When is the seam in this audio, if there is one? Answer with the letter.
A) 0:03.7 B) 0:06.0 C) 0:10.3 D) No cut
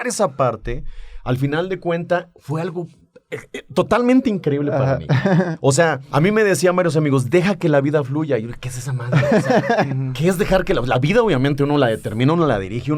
B